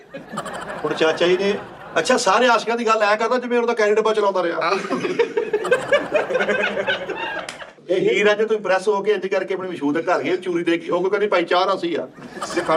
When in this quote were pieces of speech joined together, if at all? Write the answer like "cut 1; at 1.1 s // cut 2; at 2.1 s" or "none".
cut 1; at 1.7 s // cut 2; at 7.8 s

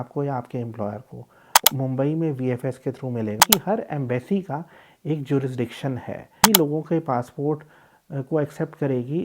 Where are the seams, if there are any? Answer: cut 1; at 1.7 s // cut 2; at 3.4 s // cut 3; at 6.4 s

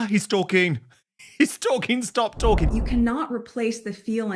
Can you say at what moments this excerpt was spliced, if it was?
cut 1; at 2.8 s

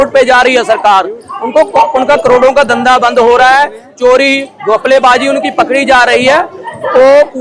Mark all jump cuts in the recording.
none

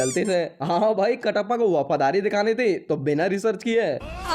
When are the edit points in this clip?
none

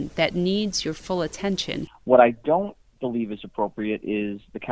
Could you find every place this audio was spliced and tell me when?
cut 1; at 1.9 s

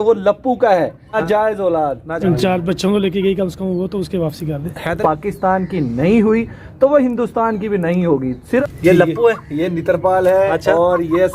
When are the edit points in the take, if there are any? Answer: cut 1; at 1.0 s // cut 2; at 2.1 s // cut 3; at 5.0 s // cut 4; at 8.4 s

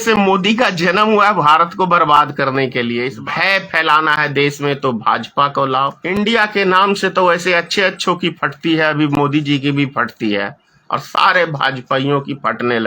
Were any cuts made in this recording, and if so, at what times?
cut 1; at 3.2 s // cut 2; at 6.0 s

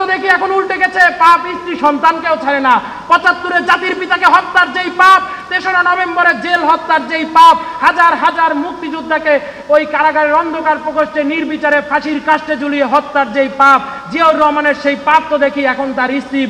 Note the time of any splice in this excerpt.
none

